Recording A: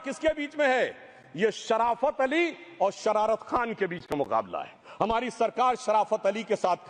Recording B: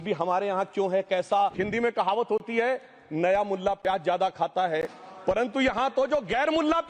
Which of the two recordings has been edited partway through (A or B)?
B